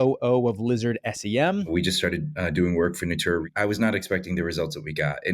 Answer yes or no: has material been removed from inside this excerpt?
yes